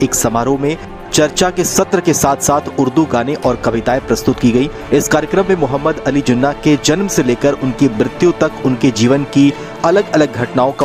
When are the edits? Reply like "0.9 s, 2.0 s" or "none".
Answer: none